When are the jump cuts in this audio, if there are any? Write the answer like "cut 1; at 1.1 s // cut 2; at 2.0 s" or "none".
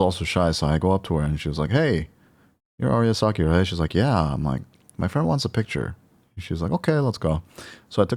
none